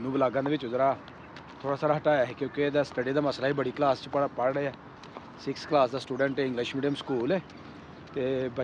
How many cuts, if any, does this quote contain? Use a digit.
0